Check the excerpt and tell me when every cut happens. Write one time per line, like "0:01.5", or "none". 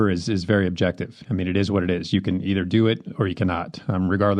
none